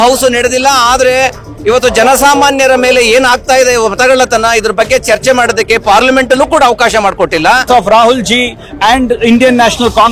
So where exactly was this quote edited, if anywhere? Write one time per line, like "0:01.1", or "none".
0:07.6